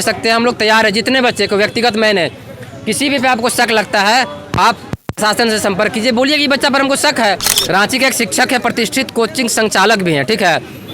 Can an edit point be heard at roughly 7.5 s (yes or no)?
yes